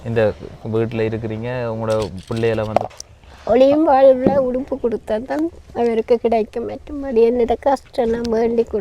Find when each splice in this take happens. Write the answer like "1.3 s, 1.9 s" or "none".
2.9 s